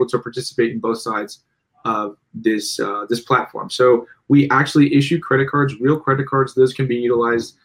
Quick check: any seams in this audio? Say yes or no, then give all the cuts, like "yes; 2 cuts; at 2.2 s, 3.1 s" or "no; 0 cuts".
no; 0 cuts